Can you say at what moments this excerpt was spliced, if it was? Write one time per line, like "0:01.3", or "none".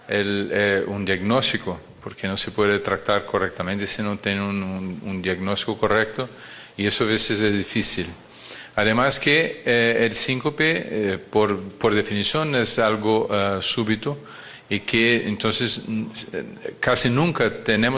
0:10.6